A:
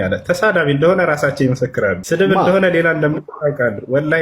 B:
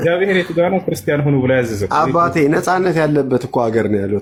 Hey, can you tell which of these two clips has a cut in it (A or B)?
A